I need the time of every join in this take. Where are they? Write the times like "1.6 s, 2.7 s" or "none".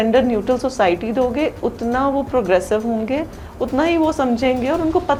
none